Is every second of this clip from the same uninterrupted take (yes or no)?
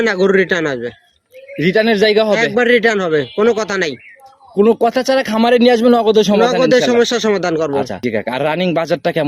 no